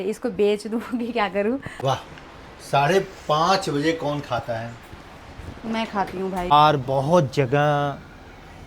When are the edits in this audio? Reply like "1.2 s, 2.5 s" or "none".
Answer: 1.7 s, 6.5 s